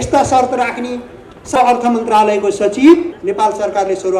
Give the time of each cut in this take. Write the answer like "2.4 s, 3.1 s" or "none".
1.5 s, 3.1 s

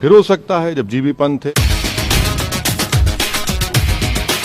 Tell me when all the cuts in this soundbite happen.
1.5 s

